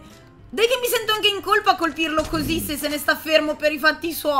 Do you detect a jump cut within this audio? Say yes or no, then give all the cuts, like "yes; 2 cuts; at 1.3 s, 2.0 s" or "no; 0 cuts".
no; 0 cuts